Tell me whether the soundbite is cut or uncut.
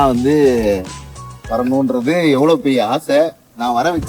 uncut